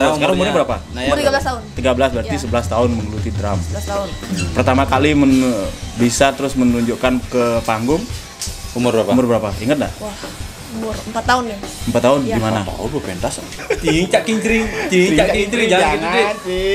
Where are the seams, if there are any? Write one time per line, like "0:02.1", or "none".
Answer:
0:13.5